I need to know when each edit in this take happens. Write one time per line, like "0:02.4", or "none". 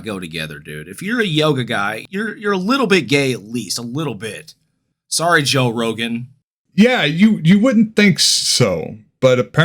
0:02.0